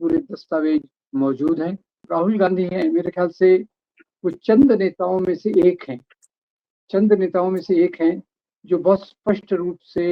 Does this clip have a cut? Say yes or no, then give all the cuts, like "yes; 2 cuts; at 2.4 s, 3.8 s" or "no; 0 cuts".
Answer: yes; 1 cut; at 2.0 s